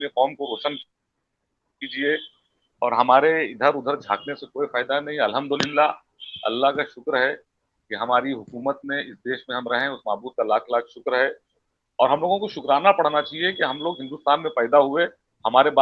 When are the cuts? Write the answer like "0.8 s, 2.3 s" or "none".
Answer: none